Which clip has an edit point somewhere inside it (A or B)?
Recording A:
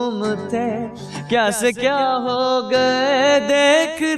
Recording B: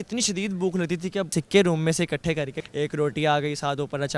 B